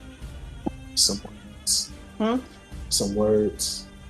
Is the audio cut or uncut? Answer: uncut